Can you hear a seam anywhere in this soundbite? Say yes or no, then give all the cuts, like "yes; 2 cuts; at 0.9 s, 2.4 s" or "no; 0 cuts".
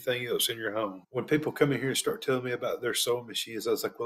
yes; 1 cut; at 1.0 s